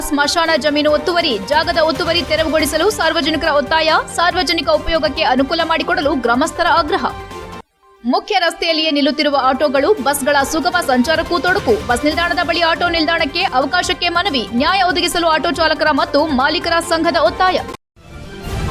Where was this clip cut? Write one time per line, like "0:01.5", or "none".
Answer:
0:17.8